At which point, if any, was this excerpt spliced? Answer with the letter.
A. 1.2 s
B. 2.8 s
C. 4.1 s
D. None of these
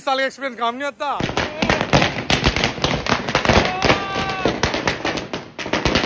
A